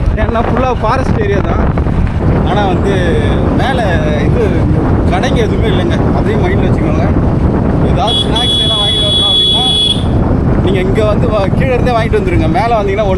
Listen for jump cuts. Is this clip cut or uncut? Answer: uncut